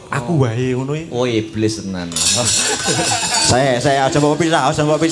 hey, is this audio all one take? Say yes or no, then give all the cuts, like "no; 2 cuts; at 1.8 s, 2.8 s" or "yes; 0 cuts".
yes; 0 cuts